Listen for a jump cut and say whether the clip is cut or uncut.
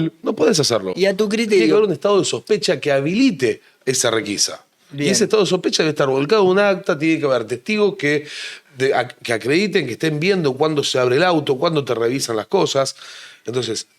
uncut